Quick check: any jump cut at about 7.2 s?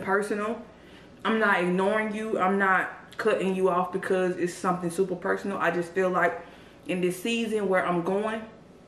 no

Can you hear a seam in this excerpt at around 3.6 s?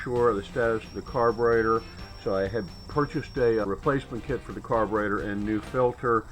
yes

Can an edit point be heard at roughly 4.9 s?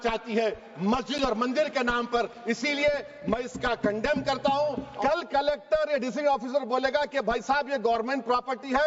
yes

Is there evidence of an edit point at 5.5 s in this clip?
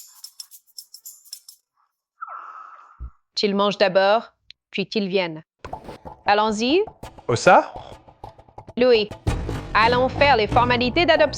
yes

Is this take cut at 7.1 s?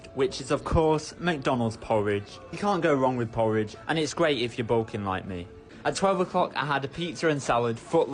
no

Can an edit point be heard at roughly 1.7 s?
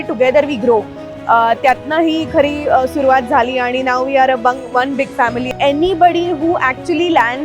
no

